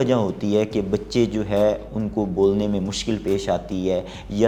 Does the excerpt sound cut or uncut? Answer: uncut